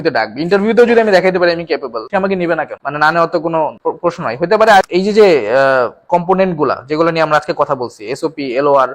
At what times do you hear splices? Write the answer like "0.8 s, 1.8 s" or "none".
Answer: 4.8 s